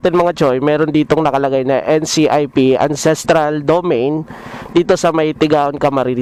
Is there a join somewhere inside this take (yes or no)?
no